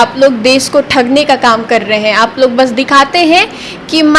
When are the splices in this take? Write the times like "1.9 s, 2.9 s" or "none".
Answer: none